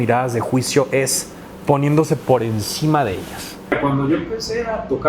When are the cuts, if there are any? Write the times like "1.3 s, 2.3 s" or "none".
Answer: 3.7 s